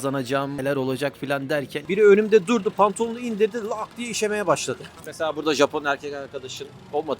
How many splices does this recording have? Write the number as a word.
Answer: two